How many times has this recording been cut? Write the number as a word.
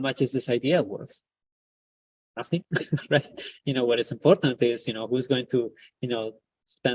zero